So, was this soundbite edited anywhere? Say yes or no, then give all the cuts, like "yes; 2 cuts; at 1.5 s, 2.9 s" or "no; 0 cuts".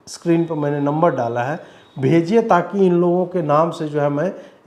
no; 0 cuts